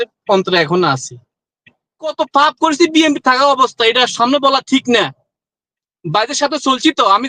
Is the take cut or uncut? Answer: cut